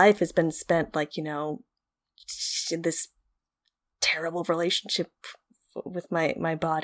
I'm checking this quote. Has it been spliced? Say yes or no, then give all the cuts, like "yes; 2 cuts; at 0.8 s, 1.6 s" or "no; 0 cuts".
no; 0 cuts